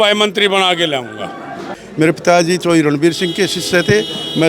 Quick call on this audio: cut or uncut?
cut